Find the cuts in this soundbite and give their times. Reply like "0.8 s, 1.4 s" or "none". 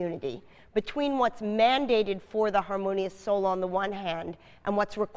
3.9 s